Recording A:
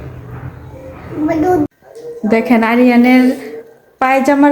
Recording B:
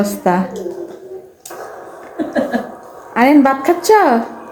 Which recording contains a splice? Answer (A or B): A